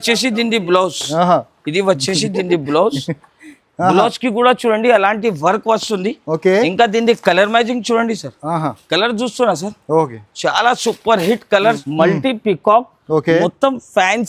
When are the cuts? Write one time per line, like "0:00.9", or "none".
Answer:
0:11.8

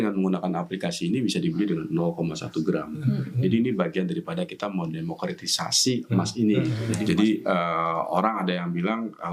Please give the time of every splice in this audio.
0:07.0

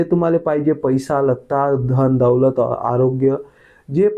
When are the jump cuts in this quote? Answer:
none

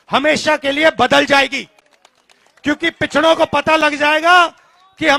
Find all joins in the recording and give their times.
none

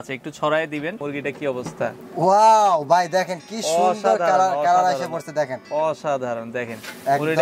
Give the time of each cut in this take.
0:01.0

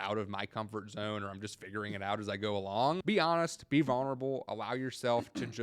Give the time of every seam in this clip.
0:03.0

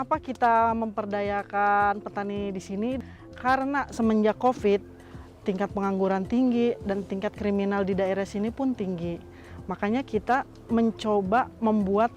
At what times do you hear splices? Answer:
0:03.0

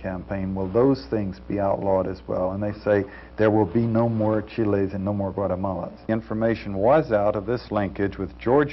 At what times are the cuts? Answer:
0:06.0

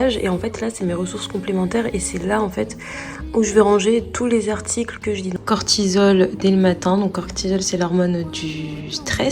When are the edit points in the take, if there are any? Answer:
0:05.4

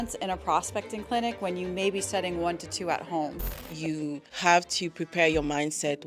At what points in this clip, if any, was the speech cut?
0:03.8

